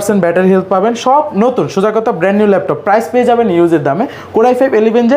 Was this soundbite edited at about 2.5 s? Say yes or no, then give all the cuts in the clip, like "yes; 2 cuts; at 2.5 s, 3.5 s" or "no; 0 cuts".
no; 0 cuts